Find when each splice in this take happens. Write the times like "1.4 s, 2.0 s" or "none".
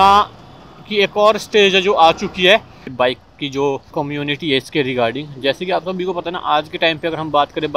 2.8 s

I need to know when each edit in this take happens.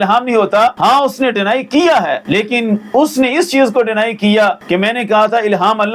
0.8 s, 2.2 s, 4.6 s

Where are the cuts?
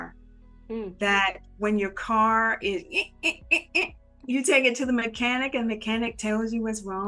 none

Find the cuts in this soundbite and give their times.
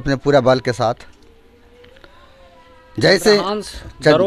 none

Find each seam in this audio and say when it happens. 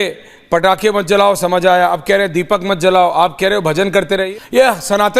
4.2 s

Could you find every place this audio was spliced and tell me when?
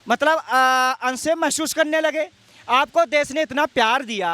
none

